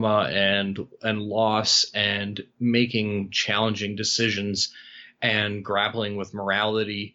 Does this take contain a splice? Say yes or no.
no